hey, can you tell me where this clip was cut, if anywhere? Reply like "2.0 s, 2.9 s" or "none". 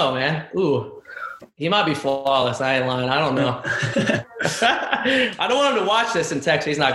4.3 s